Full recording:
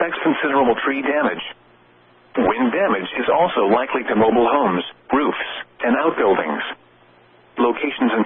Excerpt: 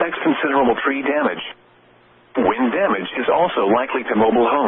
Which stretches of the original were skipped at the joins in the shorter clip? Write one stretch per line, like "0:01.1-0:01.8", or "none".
none